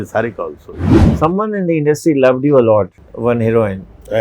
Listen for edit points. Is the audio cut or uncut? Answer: cut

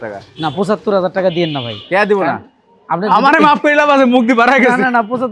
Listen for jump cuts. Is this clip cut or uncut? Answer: uncut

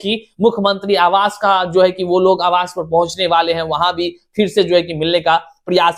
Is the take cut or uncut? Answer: uncut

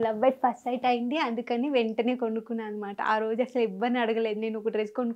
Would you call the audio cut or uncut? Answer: uncut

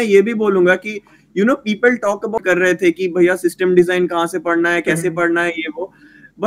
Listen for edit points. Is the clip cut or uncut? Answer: cut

